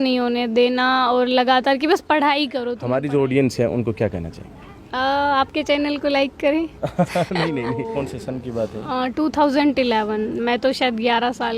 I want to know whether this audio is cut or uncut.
cut